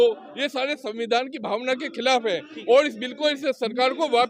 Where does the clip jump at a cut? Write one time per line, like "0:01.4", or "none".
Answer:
none